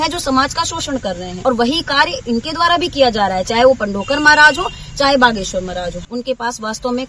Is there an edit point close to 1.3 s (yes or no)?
yes